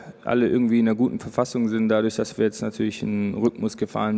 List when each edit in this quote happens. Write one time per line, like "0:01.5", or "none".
none